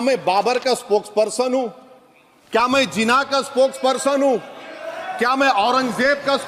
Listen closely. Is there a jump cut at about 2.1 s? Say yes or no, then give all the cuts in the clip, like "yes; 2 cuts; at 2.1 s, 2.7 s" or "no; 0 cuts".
no; 0 cuts